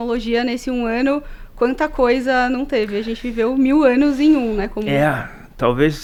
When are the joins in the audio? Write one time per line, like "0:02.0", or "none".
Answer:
none